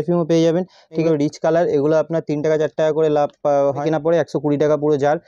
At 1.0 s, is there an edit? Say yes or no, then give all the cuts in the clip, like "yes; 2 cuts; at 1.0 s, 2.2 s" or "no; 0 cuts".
yes; 2 cuts; at 1.0 s, 3.8 s